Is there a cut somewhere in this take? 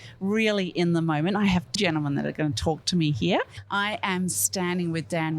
yes; 2 cuts; at 1.8 s, 3.6 s

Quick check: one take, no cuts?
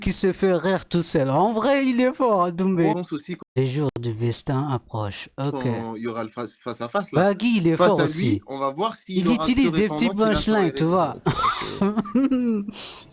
no; 2 cuts; at 2.9 s, 11.2 s

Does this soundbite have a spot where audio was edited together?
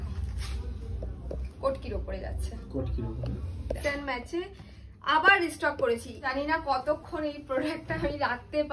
yes; 2 cuts; at 3.8 s, 6.3 s

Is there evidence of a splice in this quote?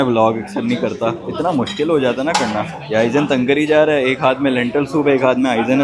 no; 0 cuts

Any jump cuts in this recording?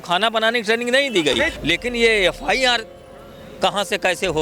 yes; 1 cut; at 1.6 s

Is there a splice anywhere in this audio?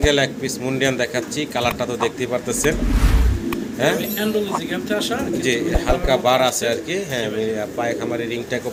no; 0 cuts

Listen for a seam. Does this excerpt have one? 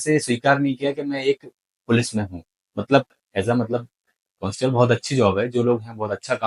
no; 0 cuts

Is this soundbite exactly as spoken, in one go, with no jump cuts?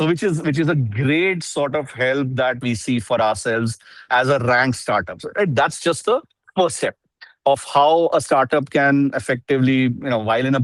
no; 1 cut; at 2.6 s

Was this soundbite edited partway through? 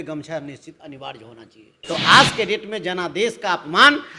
yes; 1 cut; at 1.8 s

